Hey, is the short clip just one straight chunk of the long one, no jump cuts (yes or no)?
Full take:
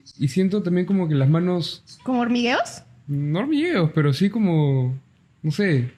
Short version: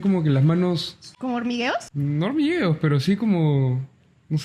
no